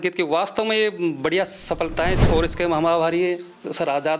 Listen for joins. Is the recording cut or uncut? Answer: cut